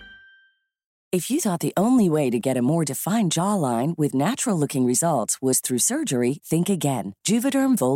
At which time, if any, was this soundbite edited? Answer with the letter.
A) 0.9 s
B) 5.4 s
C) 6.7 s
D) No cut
A